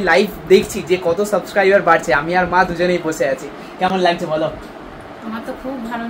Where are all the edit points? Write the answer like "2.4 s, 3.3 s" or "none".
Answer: none